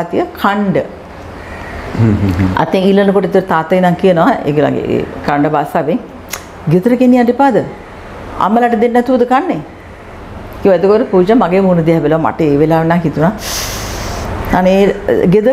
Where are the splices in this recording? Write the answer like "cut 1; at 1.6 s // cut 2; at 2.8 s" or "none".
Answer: none